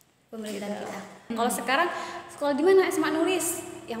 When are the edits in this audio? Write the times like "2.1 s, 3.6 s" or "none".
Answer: 1.3 s